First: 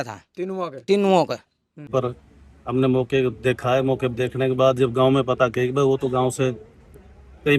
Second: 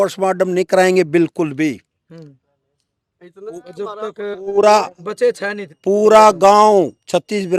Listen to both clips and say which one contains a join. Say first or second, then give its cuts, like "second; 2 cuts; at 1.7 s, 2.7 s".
first; 1 cut; at 1.9 s